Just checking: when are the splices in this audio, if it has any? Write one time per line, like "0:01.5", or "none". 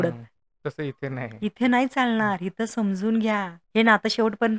0:03.6